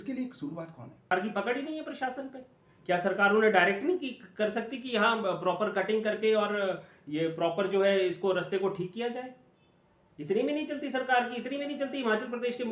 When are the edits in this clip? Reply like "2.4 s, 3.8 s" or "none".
1.1 s